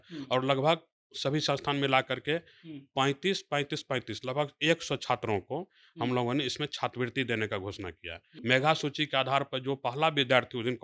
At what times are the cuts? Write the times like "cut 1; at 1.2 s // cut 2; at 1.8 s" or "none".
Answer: cut 1; at 8.2 s